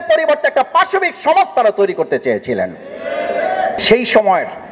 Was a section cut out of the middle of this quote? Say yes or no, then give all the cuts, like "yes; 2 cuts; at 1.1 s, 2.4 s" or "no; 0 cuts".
yes; 1 cut; at 3.8 s